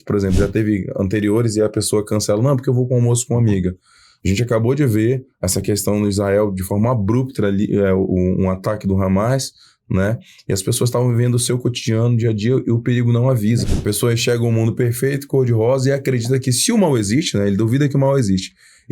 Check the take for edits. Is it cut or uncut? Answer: cut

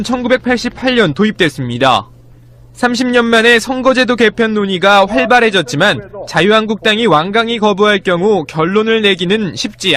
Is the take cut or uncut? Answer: uncut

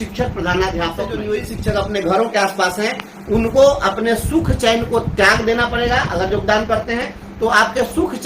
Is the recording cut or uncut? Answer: cut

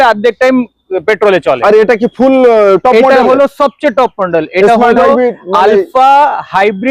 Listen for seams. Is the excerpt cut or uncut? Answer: uncut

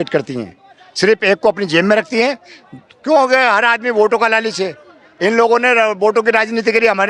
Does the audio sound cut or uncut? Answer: uncut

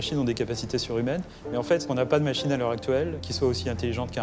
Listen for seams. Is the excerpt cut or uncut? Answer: cut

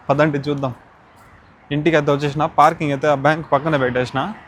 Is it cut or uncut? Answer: uncut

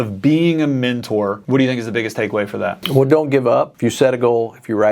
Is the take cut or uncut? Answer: cut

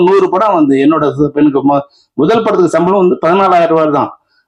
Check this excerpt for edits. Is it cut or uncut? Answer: uncut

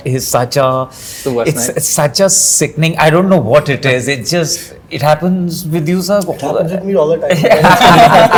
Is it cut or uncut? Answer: uncut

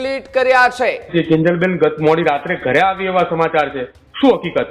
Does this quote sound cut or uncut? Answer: cut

